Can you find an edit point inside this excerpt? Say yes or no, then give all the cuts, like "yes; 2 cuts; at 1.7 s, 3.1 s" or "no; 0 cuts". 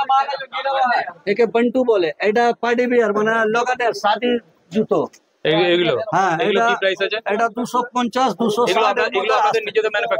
no; 0 cuts